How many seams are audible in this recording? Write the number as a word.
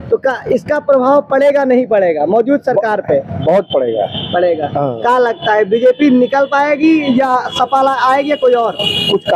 zero